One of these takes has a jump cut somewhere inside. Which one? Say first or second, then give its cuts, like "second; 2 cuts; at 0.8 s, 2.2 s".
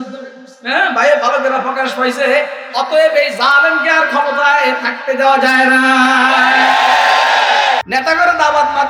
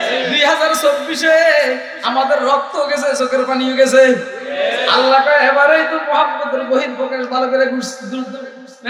first; 1 cut; at 7.8 s